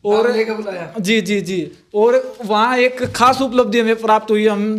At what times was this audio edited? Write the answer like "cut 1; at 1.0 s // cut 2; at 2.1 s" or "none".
none

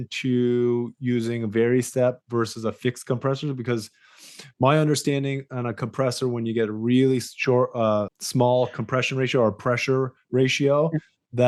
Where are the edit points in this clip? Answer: none

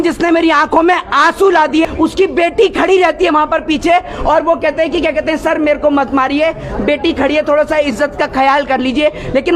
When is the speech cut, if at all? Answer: cut 1; at 1.8 s

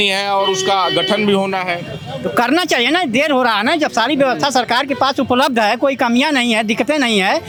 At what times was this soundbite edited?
none

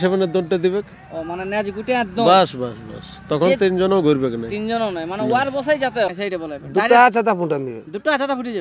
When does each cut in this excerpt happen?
cut 1; at 6.1 s

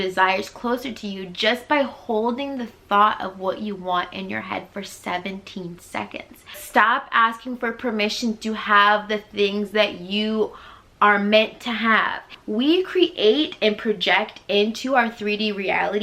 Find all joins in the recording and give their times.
cut 1; at 6.6 s // cut 2; at 12.3 s

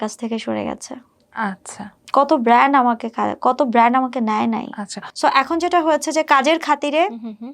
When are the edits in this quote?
none

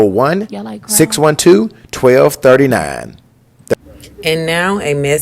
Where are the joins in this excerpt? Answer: cut 1; at 3.7 s

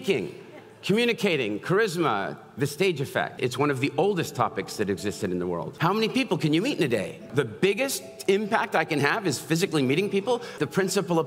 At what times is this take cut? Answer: cut 1; at 3.4 s // cut 2; at 5.7 s // cut 3; at 7.3 s // cut 4; at 10.6 s

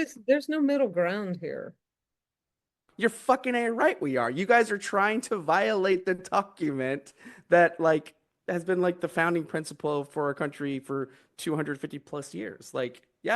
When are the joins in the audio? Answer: cut 1; at 2.9 s

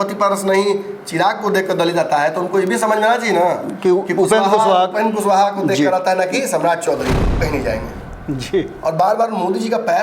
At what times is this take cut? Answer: cut 1; at 7.4 s

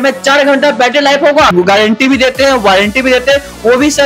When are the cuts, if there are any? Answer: cut 1; at 1.5 s

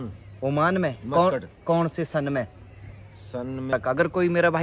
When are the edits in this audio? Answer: cut 1; at 3.7 s

